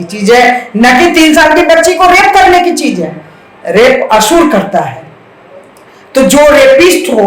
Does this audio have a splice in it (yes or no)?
no